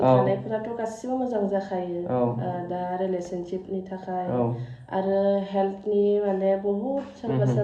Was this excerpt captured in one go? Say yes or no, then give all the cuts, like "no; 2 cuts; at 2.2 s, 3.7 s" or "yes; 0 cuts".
yes; 0 cuts